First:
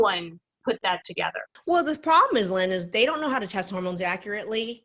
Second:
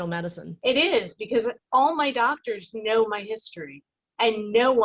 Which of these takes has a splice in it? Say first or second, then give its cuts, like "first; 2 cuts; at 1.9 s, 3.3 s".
first; 1 cut; at 1.5 s